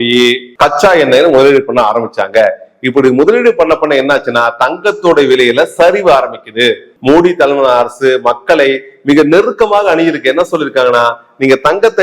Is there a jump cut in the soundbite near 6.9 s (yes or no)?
yes